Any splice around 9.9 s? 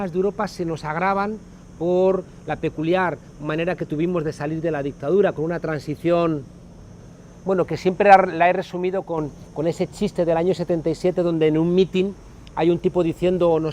no; 0 cuts

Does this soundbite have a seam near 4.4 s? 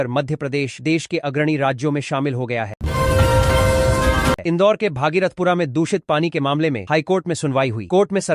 yes; 2 cuts; at 2.8 s, 4.4 s

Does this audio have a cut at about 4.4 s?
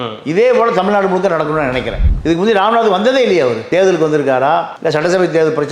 no; 1 cut; at 2.1 s

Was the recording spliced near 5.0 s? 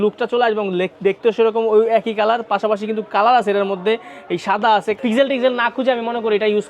yes; 1 cut; at 5.0 s

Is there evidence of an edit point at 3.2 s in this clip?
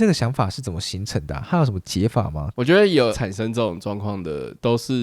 yes; 2 cuts; at 2.4 s, 3.2 s

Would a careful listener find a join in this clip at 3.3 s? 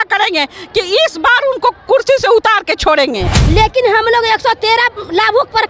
yes; 1 cut; at 3.3 s

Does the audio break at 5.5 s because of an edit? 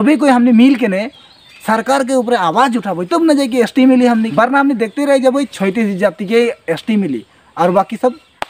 yes; 2 cuts; at 4.3 s, 5.5 s

